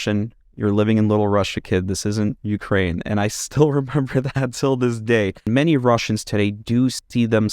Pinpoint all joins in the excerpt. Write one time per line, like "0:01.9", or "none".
0:05.5